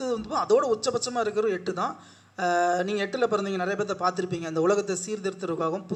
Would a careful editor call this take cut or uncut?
uncut